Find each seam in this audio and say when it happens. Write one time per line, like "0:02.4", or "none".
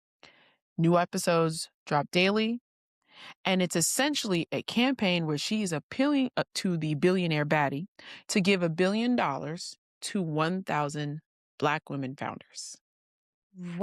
none